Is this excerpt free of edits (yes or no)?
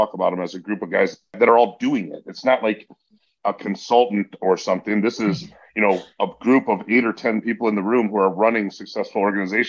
no